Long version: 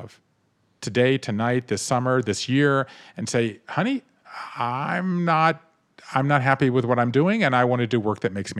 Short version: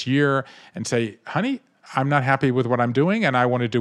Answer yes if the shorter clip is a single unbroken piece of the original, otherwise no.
no